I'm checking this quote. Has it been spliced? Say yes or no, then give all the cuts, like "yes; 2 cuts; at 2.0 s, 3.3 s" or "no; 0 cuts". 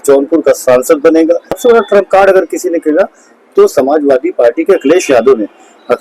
yes; 1 cut; at 1.5 s